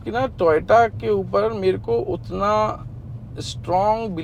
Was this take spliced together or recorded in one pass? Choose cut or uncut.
uncut